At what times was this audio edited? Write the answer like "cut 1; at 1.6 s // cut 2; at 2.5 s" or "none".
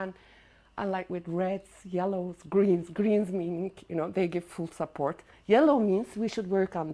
cut 1; at 4.7 s